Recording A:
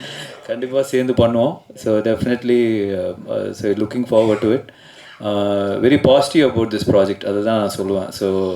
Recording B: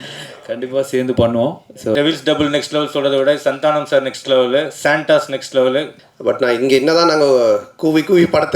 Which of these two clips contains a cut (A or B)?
B